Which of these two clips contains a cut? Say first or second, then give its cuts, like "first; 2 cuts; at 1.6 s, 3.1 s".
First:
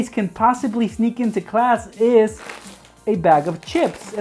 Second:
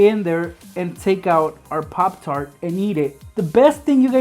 second; 1 cut; at 3.2 s